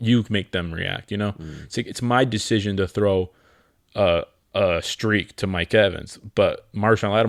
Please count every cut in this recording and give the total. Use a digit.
0